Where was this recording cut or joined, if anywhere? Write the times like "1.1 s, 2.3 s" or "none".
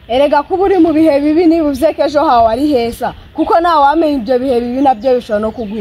none